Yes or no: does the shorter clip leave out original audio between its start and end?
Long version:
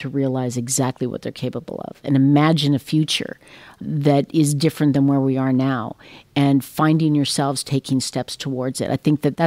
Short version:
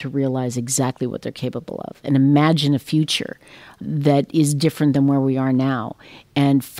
no